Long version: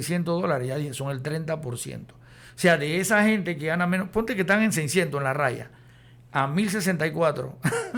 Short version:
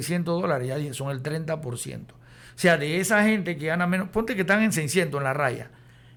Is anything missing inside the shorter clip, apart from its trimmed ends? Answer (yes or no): no